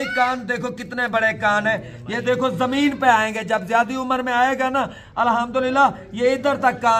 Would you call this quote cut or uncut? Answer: uncut